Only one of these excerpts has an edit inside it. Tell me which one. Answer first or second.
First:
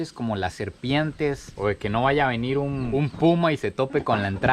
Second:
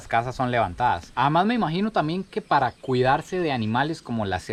first